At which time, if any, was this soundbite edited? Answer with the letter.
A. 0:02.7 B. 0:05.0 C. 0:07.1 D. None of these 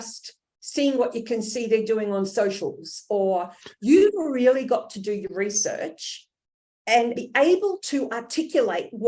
C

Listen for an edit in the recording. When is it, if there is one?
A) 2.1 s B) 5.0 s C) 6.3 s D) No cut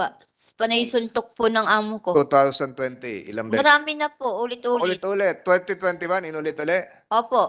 A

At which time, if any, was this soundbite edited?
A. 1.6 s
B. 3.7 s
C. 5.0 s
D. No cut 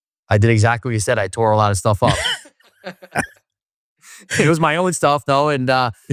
D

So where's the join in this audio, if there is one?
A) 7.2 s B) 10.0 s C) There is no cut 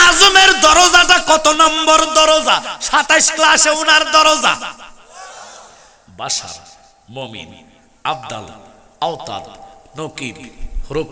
C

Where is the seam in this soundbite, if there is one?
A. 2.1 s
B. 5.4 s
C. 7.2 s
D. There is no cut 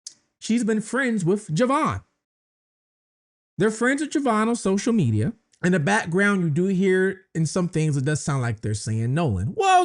B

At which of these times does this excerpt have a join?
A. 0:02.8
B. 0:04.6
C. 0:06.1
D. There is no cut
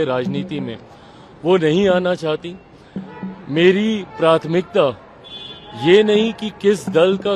D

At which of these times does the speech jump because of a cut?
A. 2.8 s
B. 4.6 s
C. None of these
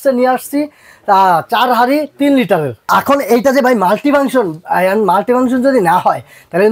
A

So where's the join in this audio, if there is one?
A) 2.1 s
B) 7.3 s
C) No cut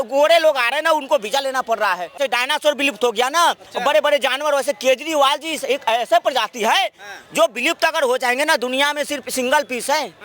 A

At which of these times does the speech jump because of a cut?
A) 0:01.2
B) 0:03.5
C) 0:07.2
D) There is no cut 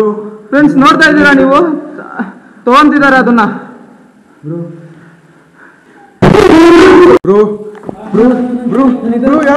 C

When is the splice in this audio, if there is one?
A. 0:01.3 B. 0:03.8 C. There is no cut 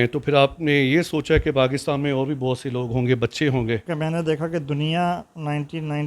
B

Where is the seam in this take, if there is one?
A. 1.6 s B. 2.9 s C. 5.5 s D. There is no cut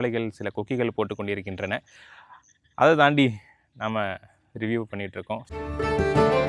C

